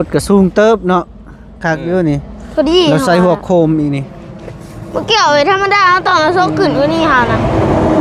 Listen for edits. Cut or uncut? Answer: uncut